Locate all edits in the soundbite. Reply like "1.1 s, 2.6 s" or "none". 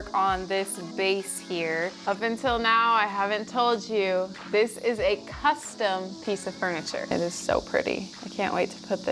2.0 s, 7.1 s